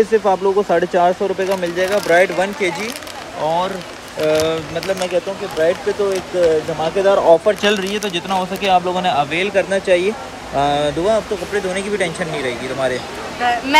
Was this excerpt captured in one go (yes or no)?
yes